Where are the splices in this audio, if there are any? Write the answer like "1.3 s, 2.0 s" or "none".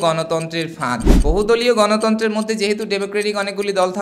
1.1 s

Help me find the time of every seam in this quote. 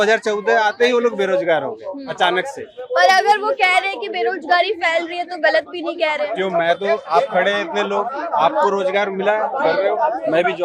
none

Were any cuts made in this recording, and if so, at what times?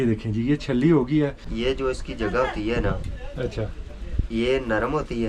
1.5 s

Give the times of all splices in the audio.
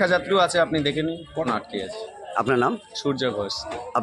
1.5 s

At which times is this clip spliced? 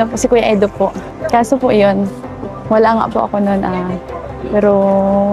1.1 s

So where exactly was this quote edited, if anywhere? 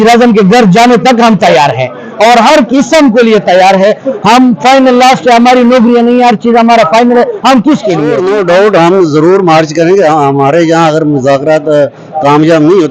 8.2 s

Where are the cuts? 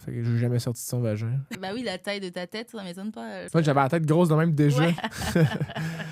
1.5 s, 3.4 s, 5.0 s

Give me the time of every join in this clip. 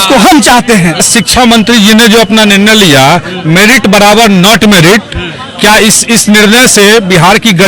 1.0 s

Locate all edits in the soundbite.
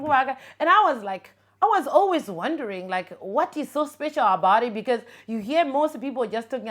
none

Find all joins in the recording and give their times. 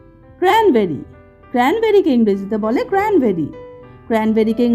none

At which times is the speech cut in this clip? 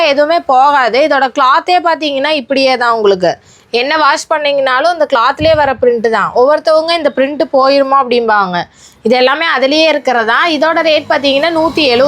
none

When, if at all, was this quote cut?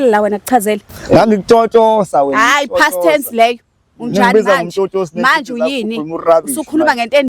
0.9 s

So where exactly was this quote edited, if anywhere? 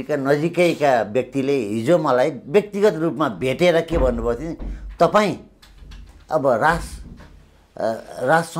none

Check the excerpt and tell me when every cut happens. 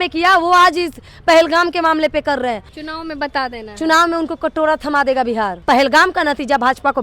2.7 s, 5.6 s

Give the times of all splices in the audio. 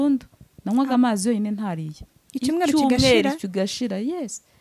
none

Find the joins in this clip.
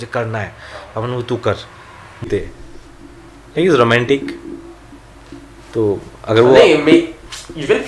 2.2 s

